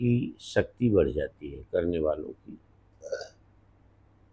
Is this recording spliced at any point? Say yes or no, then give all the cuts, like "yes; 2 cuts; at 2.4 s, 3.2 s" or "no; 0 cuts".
no; 0 cuts